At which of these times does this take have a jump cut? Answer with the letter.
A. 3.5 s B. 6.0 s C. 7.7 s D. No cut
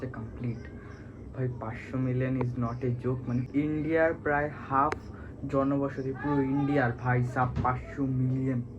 A